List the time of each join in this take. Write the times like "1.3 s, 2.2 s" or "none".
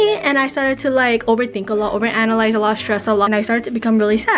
3.3 s

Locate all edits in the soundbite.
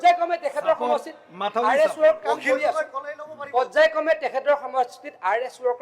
none

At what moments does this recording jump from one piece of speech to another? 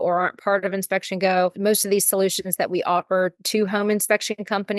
1.6 s, 3.4 s

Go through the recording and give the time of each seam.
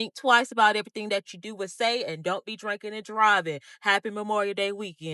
none

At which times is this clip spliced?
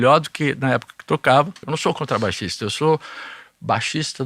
1.6 s

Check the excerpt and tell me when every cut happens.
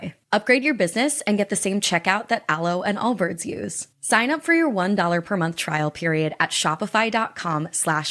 none

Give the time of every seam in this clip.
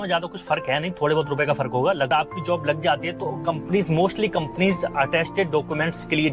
2.1 s

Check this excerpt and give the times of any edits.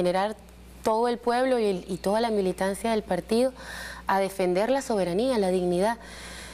3.4 s

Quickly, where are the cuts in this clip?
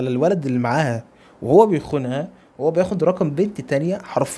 none

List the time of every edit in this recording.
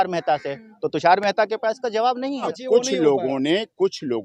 2.6 s

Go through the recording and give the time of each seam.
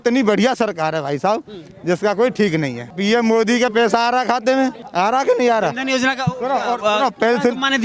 2.8 s, 4.8 s

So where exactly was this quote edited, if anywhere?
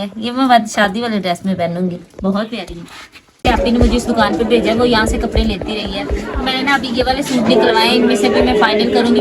3.4 s

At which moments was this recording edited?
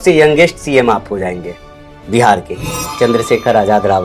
2.9 s

